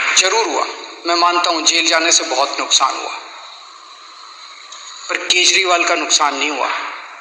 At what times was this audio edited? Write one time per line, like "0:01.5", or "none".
none